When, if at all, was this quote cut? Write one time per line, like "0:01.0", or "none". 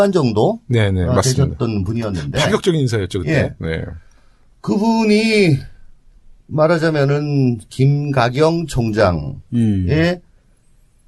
0:03.9